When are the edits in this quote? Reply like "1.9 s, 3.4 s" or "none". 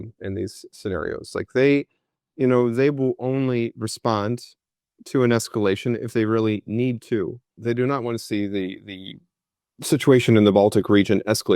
7.6 s

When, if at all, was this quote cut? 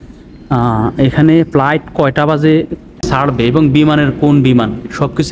3.1 s

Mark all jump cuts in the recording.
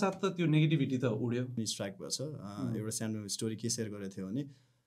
1.5 s

